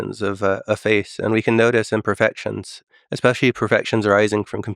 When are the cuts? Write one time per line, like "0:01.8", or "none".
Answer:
0:02.8